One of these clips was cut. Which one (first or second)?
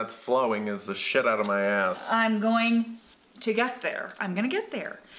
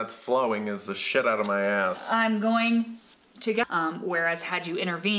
second